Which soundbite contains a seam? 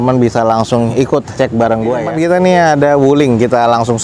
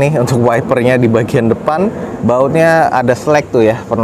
first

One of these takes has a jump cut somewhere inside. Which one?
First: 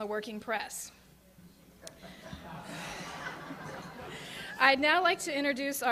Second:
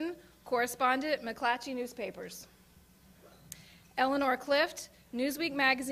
first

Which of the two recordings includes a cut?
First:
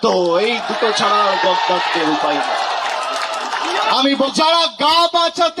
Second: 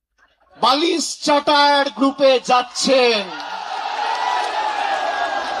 first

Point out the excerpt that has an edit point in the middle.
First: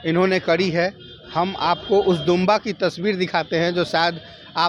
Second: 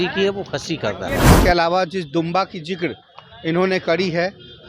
second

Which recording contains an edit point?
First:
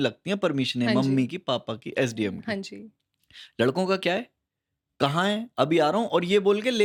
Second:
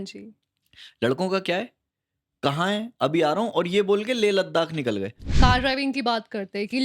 second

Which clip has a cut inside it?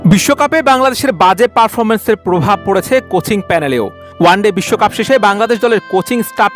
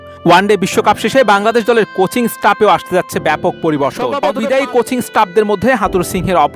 second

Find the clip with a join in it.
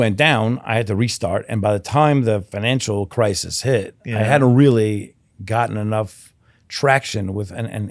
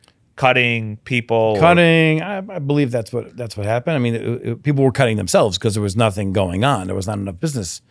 first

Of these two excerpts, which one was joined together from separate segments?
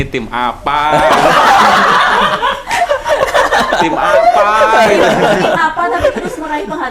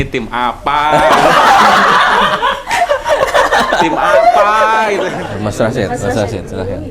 second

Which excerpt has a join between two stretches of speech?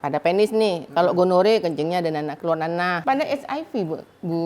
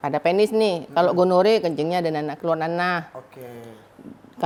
first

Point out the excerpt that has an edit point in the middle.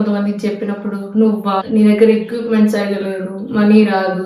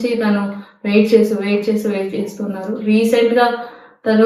first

